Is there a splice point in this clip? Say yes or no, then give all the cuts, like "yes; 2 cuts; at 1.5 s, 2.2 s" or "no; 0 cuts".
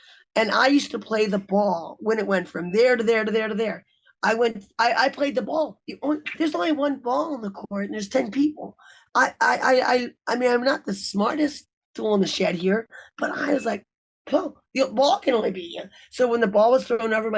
no; 0 cuts